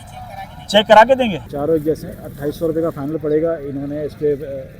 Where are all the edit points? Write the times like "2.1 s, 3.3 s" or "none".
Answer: 1.5 s